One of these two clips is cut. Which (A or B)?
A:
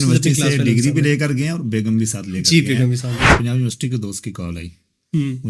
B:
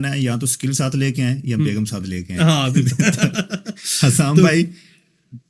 A